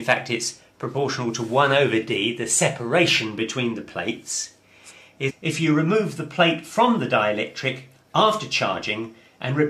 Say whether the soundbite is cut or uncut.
uncut